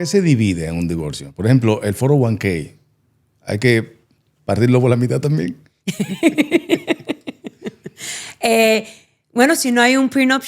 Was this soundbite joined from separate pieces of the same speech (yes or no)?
no